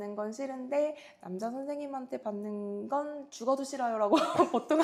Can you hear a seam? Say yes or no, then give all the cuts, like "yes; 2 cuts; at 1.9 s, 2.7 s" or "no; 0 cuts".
no; 0 cuts